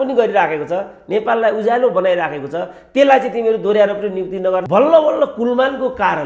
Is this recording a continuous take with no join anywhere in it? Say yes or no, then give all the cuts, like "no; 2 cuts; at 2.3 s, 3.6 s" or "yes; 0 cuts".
no; 1 cut; at 4.6 s